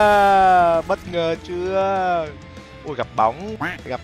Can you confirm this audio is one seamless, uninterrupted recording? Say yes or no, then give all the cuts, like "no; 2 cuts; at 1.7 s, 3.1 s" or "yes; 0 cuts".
yes; 0 cuts